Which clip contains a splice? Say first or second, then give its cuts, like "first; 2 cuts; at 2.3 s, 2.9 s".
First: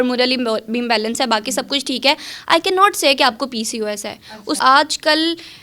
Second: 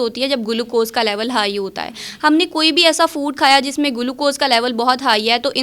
first; 1 cut; at 4.6 s